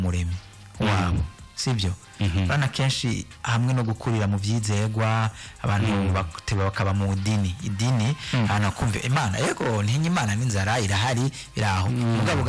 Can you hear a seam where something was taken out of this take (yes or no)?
no